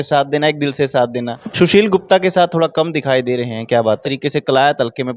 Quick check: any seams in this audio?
yes; 2 cuts; at 1.4 s, 4.1 s

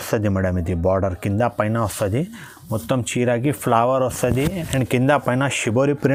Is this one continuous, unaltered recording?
yes; 0 cuts

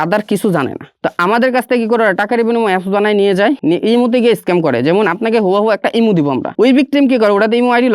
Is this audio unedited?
no; 3 cuts; at 0.9 s, 3.6 s, 6.5 s

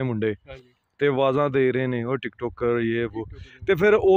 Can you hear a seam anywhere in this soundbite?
no; 0 cuts

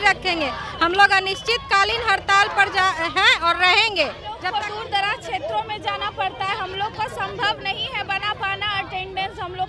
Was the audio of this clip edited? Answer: yes; 1 cut; at 4.4 s

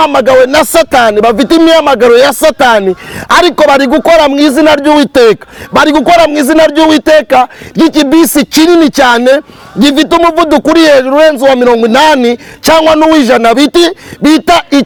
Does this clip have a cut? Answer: no; 0 cuts

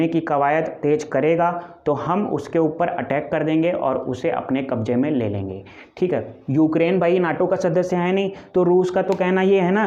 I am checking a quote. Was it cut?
yes; 1 cut; at 6.4 s

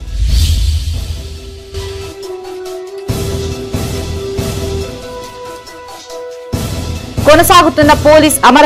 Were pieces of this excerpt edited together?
yes; 1 cut; at 3.2 s

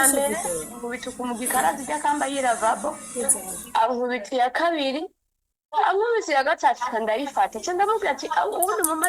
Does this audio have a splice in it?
no; 0 cuts

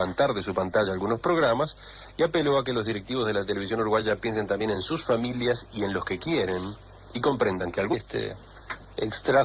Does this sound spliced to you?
no; 0 cuts

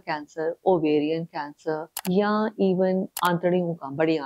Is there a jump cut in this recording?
yes; 2 cuts; at 1.9 s, 3.1 s

